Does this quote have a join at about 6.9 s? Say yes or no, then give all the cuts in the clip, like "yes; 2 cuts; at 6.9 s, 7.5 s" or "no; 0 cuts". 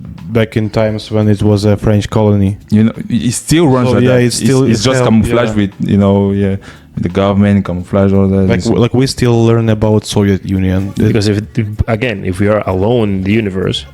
no; 1 cut; at 11.1 s